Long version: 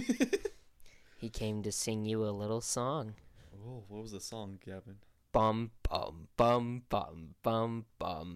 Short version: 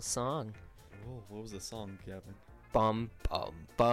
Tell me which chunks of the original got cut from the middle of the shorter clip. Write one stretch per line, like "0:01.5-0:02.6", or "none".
none